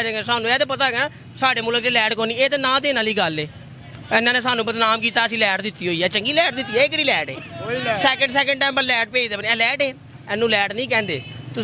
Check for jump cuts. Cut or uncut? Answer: uncut